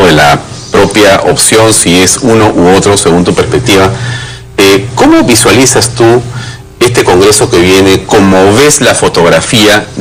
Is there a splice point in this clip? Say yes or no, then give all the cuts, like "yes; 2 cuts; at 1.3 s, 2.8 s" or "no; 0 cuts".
no; 0 cuts